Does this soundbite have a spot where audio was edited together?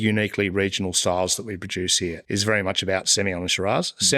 yes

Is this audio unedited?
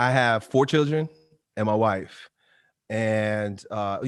yes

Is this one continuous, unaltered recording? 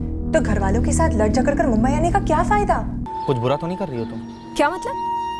no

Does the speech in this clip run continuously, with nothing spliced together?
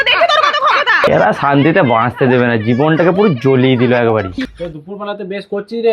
no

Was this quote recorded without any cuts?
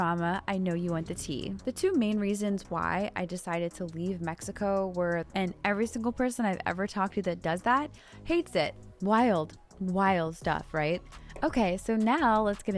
no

